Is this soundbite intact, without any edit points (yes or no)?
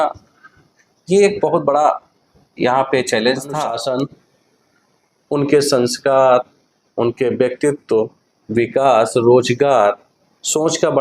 no